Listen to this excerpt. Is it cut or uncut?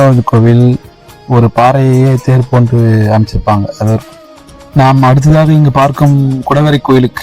cut